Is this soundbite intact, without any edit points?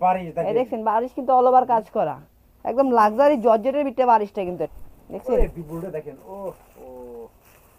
no; 1 cut; at 4.8 s

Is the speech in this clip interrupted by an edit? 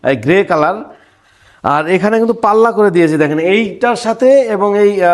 no; 0 cuts

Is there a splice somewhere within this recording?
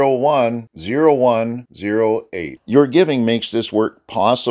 no; 0 cuts

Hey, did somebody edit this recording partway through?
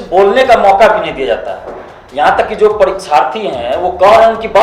no; 0 cuts

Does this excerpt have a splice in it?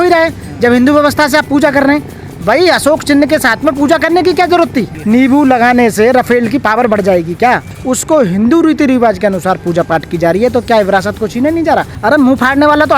yes; 3 cuts; at 4.9 s, 7.7 s, 11.9 s

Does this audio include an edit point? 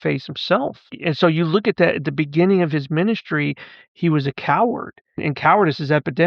yes; 2 cuts; at 0.9 s, 5.2 s

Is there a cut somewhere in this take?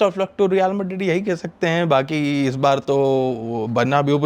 no; 0 cuts

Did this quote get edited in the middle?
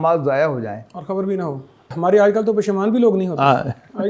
yes; 1 cut; at 1.9 s

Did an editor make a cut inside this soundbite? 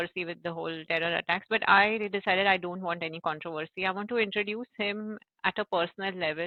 no; 0 cuts

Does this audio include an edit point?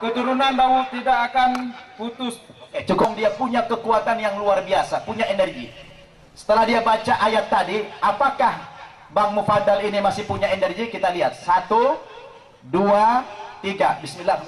yes; 1 cut; at 3.1 s

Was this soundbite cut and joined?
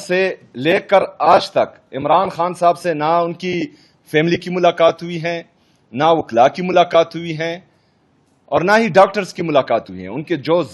no; 0 cuts

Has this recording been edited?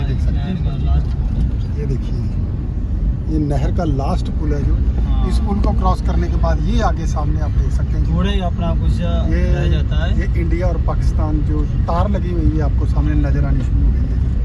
no; 0 cuts

